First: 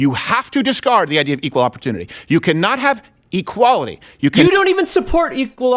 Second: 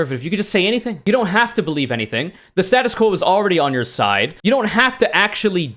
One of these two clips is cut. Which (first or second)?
second